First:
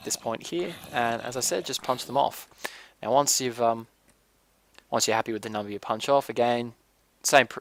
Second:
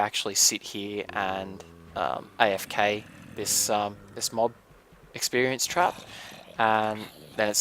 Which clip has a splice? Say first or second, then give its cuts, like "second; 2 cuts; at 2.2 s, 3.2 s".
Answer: second; 1 cut; at 2.9 s